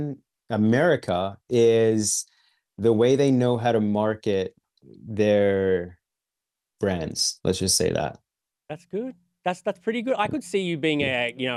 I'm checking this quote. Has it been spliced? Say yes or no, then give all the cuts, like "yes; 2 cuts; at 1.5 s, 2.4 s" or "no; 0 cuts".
no; 0 cuts